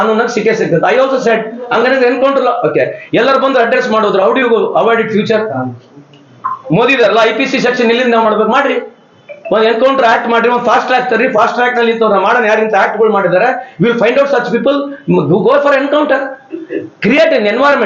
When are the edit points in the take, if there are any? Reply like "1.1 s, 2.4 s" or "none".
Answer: none